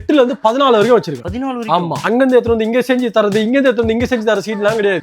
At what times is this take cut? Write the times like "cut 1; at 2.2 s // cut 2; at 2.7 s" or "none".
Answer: cut 1; at 2.0 s